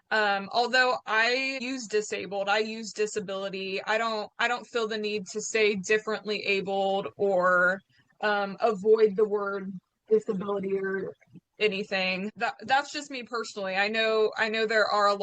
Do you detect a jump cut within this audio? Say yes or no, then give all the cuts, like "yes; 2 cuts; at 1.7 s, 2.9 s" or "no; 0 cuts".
yes; 2 cuts; at 1.6 s, 12.3 s